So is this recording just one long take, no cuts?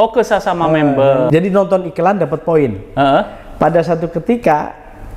no; 1 cut; at 1.3 s

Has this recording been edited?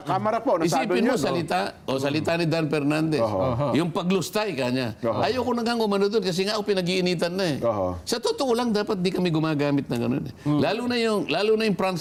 no; 0 cuts

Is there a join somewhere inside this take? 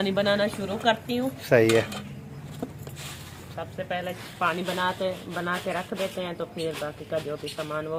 no; 0 cuts

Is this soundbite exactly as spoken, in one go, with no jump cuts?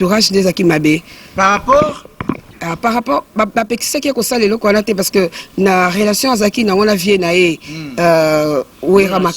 yes; 0 cuts

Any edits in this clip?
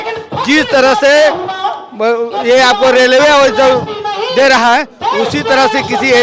no; 0 cuts

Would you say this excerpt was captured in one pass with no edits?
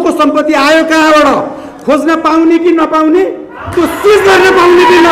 yes; 0 cuts

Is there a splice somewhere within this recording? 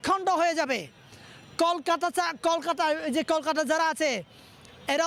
no; 0 cuts

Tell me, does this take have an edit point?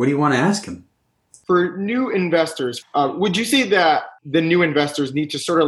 yes; 3 cuts; at 1.3 s, 2.8 s, 4.2 s

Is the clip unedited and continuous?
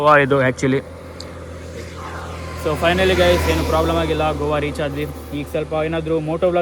yes; 0 cuts

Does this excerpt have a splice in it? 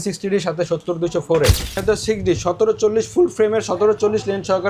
yes; 1 cut; at 1.8 s

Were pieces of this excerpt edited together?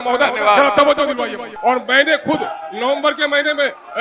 yes; 1 cut; at 1.4 s

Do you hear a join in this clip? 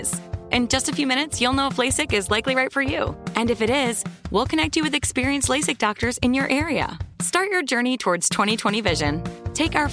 no; 0 cuts

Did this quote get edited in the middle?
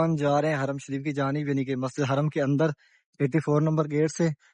no; 0 cuts

